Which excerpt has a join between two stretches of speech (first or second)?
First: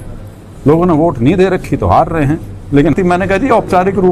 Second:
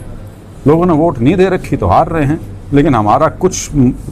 first